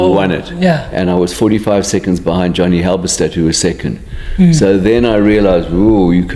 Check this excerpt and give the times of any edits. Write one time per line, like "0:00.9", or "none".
none